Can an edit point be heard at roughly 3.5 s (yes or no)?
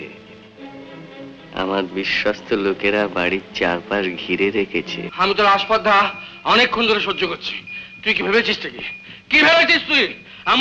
no